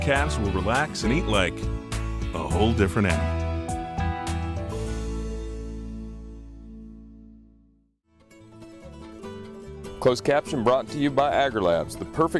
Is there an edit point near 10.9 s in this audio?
no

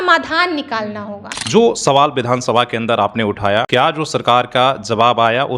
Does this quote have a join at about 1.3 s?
yes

